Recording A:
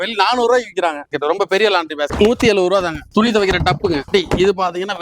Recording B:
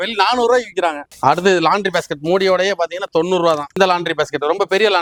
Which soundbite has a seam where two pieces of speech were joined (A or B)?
A